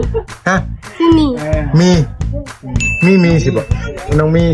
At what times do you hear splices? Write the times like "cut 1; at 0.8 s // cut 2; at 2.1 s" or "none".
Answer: none